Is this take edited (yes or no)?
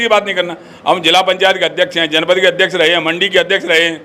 no